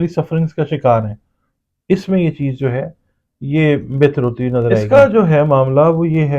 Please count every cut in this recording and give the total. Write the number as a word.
one